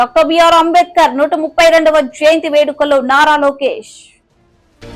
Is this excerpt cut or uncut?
uncut